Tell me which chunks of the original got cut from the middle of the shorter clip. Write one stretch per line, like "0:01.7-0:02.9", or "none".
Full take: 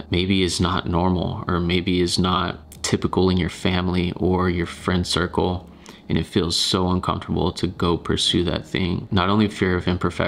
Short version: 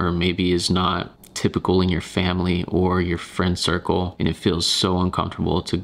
0:05.6-0:06.0